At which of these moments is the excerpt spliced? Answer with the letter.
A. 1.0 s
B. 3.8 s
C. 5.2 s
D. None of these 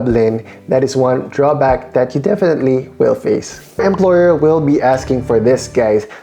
B